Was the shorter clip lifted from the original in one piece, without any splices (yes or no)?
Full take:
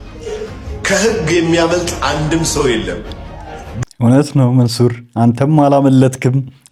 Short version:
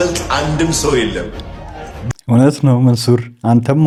yes